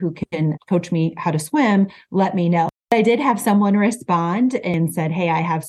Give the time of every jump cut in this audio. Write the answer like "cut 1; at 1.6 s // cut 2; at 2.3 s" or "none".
cut 1; at 2.8 s // cut 2; at 4.7 s